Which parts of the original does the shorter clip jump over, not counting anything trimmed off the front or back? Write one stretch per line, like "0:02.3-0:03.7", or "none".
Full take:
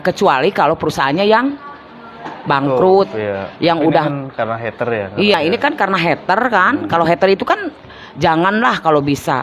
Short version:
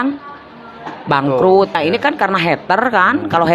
0:03.2-0:05.4